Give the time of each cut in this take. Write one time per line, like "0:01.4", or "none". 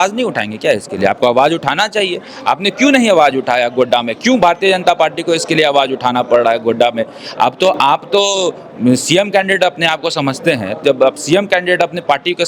none